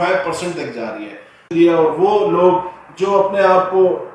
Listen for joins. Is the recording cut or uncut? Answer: cut